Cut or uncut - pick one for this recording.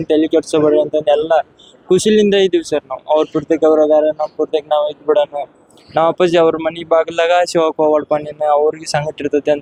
uncut